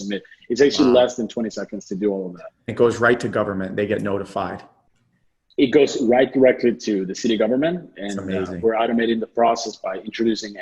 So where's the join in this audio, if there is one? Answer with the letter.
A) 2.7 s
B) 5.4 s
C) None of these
A